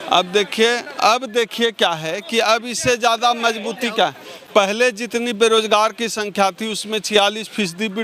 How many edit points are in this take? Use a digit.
0